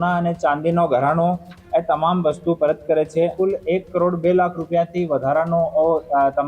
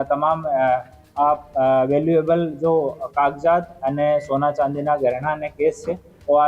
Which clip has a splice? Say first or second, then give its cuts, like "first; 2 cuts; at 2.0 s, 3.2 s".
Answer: first; 1 cut; at 3.3 s